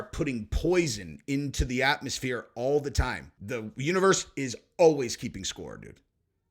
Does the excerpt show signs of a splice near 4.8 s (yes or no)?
no